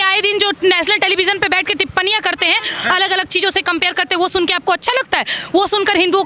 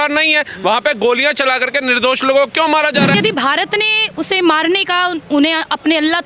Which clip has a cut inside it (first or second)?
second